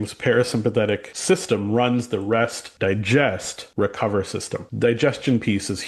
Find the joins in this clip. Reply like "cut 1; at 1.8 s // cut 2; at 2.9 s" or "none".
cut 1; at 1.1 s // cut 2; at 2.6 s // cut 3; at 3.6 s // cut 4; at 4.6 s